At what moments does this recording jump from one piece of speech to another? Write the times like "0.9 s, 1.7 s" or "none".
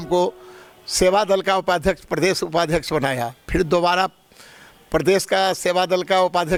none